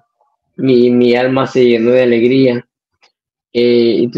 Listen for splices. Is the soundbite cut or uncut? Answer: uncut